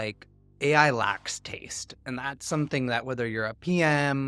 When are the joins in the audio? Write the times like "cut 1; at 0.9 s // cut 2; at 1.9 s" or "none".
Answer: none